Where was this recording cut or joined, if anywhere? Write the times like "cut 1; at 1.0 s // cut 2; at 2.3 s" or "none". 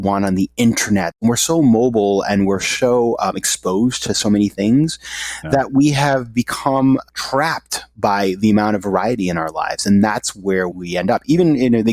cut 1; at 1.1 s // cut 2; at 7.1 s // cut 3; at 10.8 s